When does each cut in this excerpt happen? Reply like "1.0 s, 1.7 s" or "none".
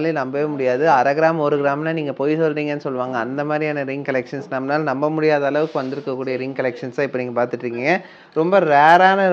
none